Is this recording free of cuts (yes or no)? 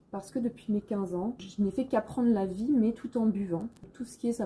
yes